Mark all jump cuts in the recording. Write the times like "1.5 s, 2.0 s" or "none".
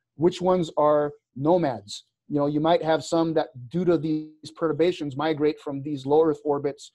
none